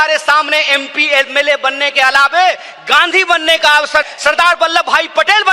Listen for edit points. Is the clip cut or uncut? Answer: cut